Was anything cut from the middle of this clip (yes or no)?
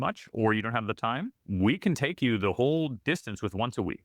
yes